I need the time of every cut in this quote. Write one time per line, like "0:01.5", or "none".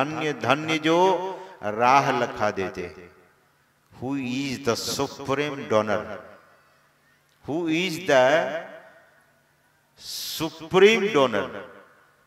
none

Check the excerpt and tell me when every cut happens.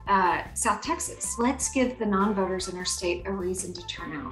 0:01.4

